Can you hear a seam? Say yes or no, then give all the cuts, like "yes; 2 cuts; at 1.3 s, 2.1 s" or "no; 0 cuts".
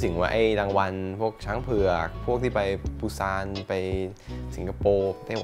no; 0 cuts